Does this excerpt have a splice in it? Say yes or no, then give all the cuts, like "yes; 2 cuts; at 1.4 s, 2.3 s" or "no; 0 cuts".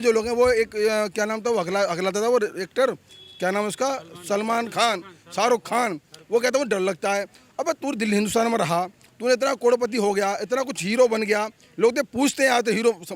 no; 0 cuts